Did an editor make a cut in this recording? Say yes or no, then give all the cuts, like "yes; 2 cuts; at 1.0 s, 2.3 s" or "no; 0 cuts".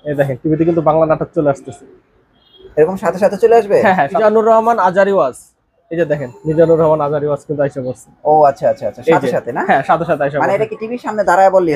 yes; 1 cut; at 4.1 s